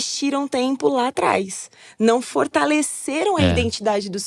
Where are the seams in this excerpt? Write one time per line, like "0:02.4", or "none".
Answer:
none